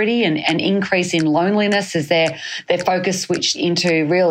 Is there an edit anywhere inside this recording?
no; 0 cuts

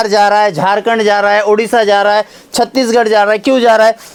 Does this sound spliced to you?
no; 0 cuts

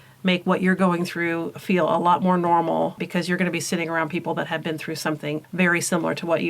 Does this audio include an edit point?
yes; 2 cuts; at 3.0 s, 5.5 s

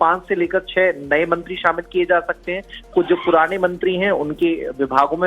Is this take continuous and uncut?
no; 1 cut; at 2.4 s

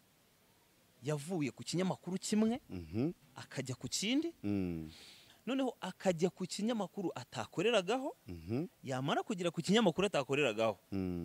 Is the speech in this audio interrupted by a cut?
no; 0 cuts

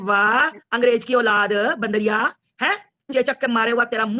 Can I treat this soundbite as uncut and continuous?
yes; 0 cuts

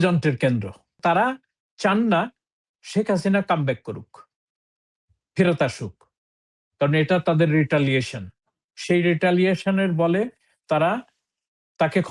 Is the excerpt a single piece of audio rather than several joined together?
no; 1 cut; at 1.0 s

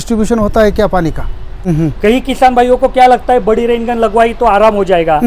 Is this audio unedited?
no; 1 cut; at 1.5 s

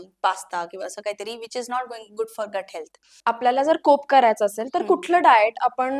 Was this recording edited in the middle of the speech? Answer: yes; 1 cut; at 3.1 s

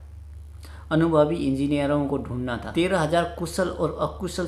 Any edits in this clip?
yes; 1 cut; at 2.6 s

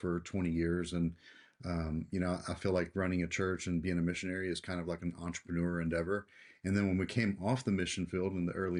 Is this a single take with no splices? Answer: yes; 0 cuts

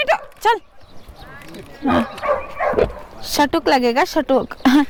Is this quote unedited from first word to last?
yes; 0 cuts

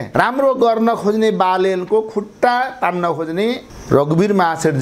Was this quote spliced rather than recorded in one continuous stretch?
no; 0 cuts

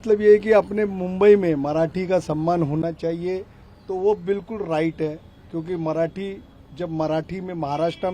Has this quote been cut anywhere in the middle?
no; 0 cuts

